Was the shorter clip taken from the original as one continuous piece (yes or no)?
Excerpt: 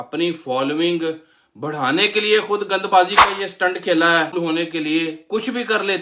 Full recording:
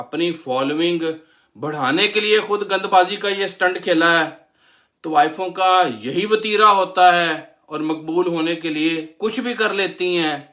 no